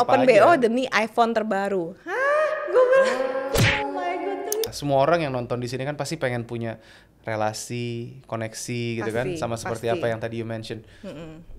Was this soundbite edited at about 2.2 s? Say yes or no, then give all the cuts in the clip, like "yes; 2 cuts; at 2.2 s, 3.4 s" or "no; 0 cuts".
no; 1 cut; at 4.7 s